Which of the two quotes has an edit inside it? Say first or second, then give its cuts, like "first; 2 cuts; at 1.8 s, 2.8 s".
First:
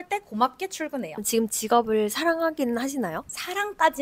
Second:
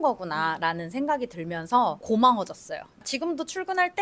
first; 1 cut; at 1.2 s